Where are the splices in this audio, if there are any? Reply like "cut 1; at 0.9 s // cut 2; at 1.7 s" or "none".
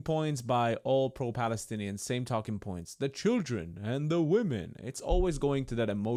none